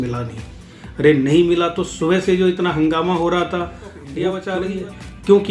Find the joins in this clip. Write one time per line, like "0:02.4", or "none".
0:04.4